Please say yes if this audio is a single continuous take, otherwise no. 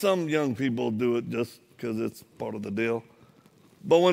yes